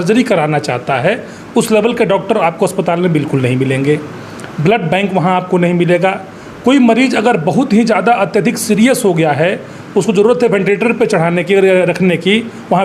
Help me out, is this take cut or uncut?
uncut